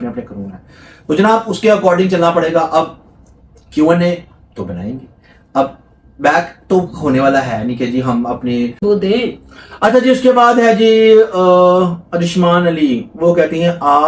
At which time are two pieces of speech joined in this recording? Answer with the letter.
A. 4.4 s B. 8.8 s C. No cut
B